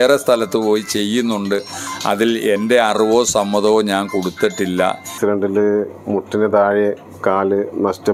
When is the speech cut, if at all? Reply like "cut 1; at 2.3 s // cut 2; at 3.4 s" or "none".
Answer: cut 1; at 5.1 s